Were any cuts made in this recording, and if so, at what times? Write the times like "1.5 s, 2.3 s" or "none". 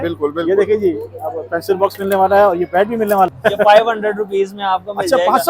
3.3 s